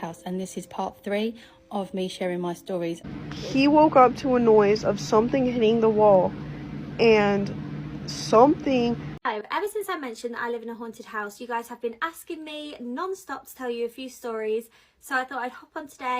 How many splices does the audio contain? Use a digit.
2